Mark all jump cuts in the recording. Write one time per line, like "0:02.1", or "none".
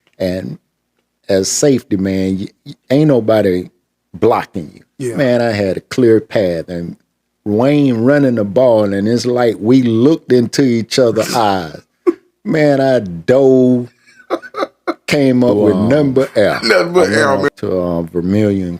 0:17.5